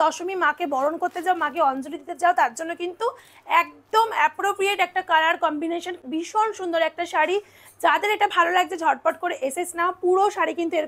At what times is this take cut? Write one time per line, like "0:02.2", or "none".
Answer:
none